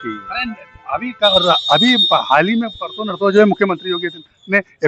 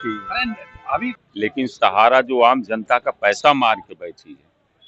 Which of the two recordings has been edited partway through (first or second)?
second